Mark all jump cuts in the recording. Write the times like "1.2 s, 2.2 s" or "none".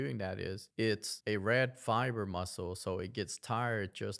1.1 s